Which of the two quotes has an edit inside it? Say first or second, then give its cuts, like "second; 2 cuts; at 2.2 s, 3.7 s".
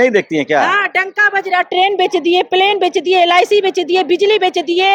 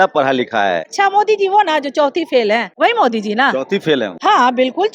second; 3 cuts; at 0.9 s, 2.7 s, 4.1 s